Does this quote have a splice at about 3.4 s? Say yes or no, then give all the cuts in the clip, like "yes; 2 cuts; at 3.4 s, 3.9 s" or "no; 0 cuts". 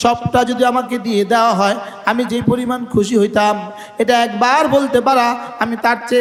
no; 0 cuts